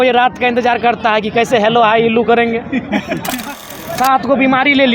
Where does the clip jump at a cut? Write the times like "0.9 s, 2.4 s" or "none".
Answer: 3.5 s